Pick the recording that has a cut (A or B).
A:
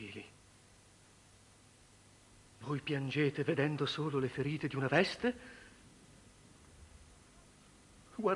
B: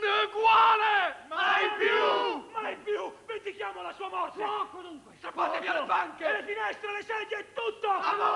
B